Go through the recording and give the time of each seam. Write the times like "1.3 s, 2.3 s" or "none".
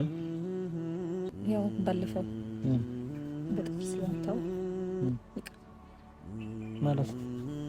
1.3 s